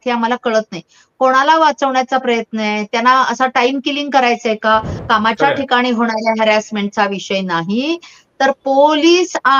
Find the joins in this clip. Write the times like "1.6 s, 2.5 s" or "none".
4.9 s